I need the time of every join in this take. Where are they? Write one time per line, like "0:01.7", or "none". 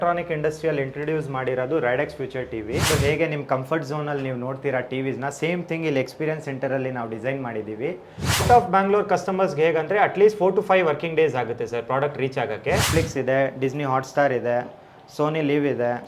0:02.9
0:08.4
0:12.9